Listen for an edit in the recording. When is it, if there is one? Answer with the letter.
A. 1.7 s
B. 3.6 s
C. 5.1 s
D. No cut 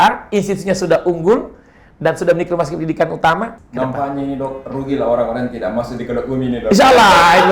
B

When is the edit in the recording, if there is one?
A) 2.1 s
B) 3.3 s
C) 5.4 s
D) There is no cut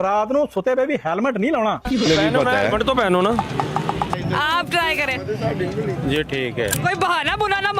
A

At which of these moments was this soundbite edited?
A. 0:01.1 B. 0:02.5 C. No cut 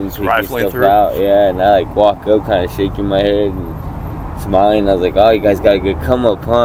C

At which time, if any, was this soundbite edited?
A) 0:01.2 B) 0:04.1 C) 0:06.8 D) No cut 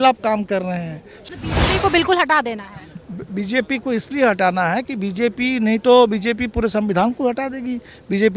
A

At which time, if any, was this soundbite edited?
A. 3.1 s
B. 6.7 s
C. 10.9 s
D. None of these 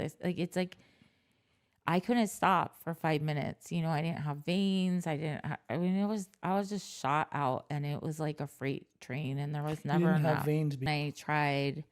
C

